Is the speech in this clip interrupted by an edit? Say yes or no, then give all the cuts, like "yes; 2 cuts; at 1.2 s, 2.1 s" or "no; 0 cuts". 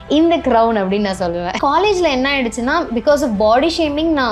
yes; 1 cut; at 1.5 s